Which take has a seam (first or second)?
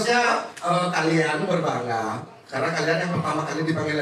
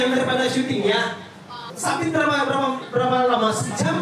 second